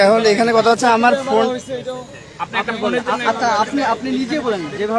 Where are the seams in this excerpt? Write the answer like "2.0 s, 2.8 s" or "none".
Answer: none